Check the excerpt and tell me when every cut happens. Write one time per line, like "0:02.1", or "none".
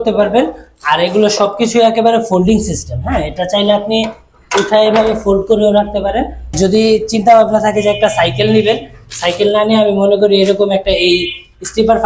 0:06.5